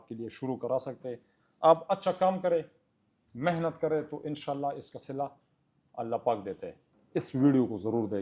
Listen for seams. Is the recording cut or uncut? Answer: cut